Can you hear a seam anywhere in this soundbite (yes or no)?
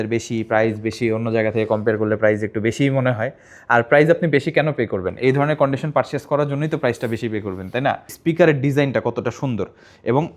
yes